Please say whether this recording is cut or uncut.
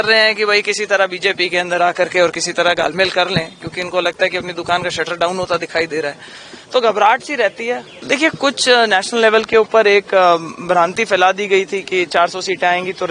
cut